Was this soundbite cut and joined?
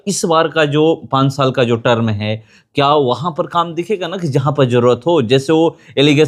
no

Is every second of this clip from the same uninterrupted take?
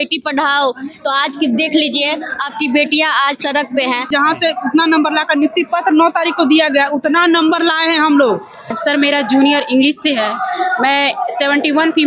no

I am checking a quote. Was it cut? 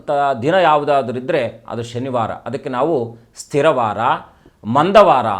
no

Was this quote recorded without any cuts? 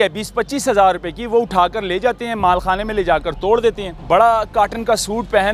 no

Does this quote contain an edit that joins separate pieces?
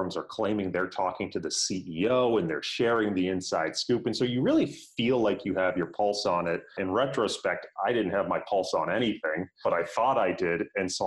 no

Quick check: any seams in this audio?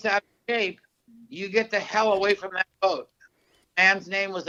no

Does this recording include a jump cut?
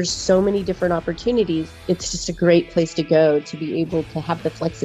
yes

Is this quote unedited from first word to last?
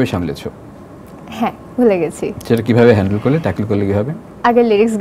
yes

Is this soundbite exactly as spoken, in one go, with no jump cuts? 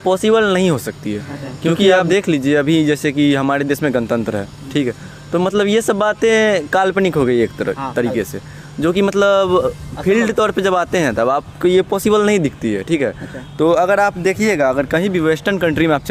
yes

